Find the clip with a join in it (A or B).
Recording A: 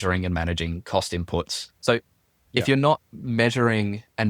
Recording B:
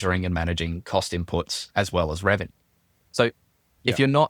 A